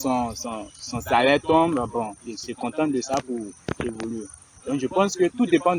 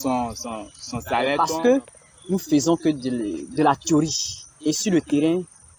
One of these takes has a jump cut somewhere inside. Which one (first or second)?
second